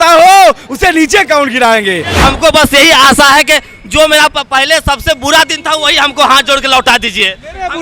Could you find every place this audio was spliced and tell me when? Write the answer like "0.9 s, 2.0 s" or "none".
2.1 s